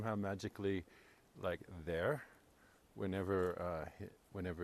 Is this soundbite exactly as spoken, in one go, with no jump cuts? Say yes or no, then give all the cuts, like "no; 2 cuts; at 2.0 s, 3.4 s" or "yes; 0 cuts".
yes; 0 cuts